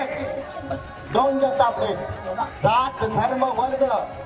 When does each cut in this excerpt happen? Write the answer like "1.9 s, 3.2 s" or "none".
2.5 s